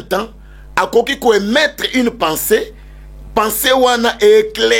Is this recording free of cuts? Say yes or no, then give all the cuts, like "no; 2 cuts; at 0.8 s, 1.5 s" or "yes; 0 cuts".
yes; 0 cuts